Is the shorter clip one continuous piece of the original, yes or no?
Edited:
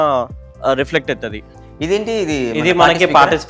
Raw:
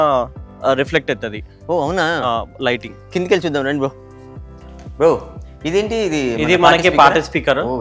no